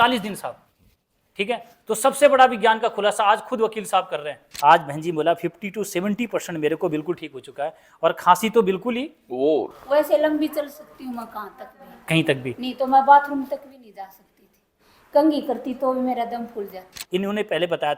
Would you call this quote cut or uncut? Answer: cut